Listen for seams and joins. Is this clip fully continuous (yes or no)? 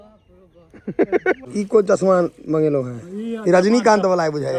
no